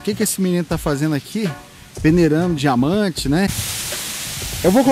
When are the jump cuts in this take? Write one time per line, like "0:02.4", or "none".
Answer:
0:03.6